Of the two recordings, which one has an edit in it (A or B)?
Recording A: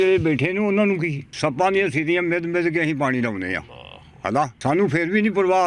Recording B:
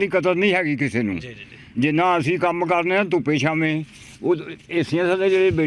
A